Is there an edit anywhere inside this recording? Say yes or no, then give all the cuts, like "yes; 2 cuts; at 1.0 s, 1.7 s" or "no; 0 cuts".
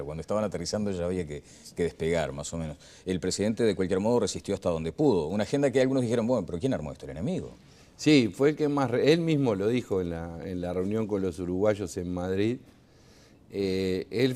yes; 1 cut; at 2.9 s